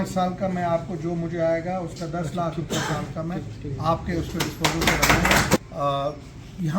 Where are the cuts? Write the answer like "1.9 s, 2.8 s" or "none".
5.6 s